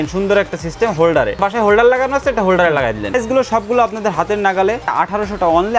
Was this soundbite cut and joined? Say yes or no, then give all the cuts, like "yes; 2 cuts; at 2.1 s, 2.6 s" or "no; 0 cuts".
yes; 3 cuts; at 1.4 s, 3.1 s, 4.9 s